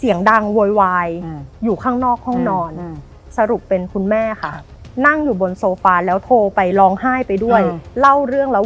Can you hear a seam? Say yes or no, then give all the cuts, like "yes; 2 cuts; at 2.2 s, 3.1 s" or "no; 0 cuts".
yes; 1 cut; at 3.2 s